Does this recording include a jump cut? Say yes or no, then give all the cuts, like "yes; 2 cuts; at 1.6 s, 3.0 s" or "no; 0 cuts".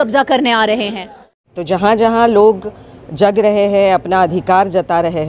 yes; 1 cut; at 1.4 s